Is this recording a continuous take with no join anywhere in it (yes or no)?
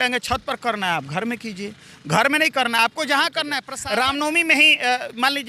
no